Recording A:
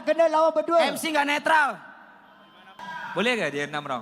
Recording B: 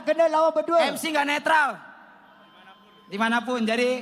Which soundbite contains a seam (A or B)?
A